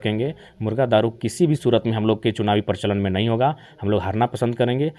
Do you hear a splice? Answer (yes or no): no